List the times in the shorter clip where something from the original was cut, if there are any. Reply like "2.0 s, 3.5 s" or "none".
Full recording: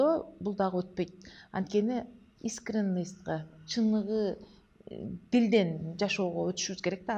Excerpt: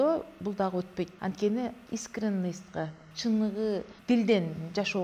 1.1 s, 1.8 s, 3.9 s